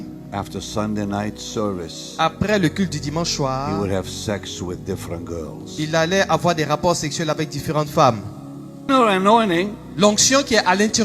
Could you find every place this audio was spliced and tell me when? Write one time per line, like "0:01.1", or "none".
0:08.9